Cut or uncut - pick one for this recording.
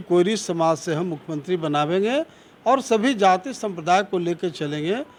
uncut